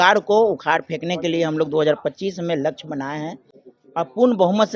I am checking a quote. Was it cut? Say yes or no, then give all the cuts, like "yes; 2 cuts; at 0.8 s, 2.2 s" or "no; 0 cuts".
no; 0 cuts